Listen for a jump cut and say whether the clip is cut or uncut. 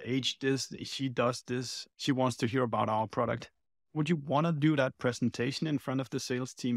uncut